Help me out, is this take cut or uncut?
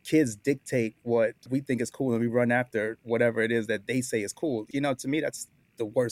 cut